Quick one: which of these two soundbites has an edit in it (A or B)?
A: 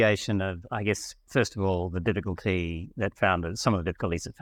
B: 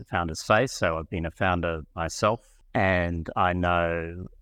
B